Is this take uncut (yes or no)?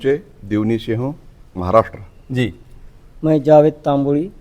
yes